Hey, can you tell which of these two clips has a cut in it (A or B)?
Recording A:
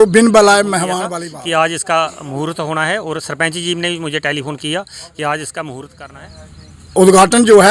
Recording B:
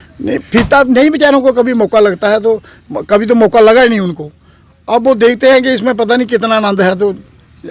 A